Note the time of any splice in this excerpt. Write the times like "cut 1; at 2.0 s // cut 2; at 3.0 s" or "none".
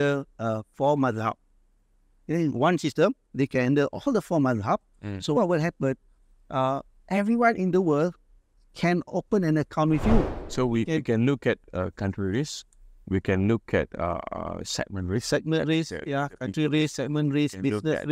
cut 1; at 10.4 s